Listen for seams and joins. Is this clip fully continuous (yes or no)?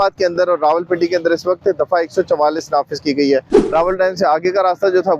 no